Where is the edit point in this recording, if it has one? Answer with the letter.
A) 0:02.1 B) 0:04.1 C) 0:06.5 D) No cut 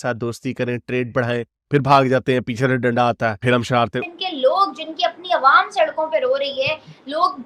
B